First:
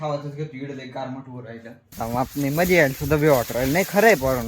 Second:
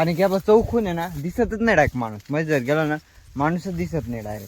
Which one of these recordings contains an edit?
first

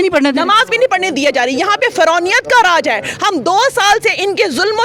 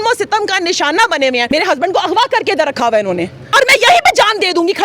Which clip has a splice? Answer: second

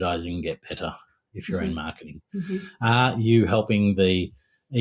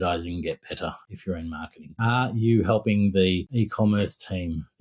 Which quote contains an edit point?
second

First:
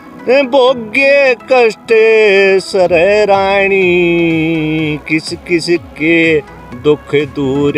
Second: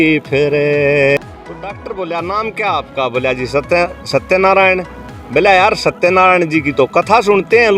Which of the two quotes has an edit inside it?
second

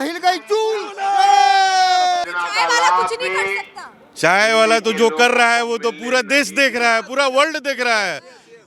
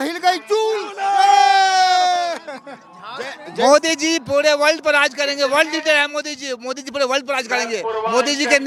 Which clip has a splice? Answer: first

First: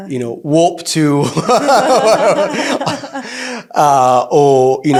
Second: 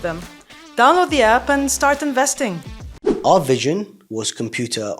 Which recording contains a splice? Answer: second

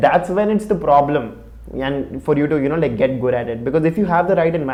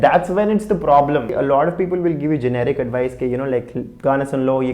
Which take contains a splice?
second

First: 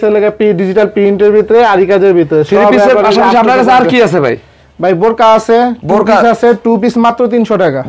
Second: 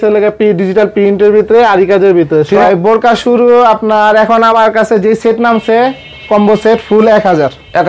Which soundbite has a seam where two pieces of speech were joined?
second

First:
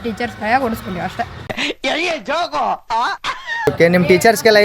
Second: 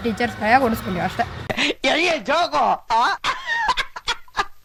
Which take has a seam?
first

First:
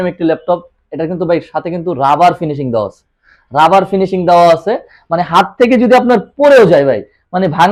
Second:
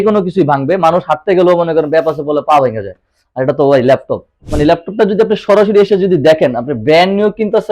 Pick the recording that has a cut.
second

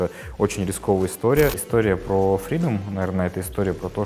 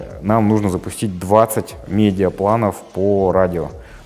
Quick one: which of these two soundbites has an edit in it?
first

